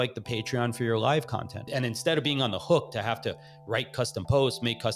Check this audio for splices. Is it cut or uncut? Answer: uncut